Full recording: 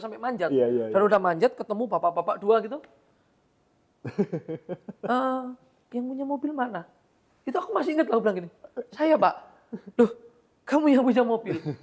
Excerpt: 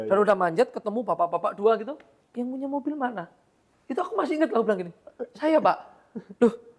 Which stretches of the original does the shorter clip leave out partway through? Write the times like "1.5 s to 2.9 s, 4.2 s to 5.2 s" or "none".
3.0 s to 5.7 s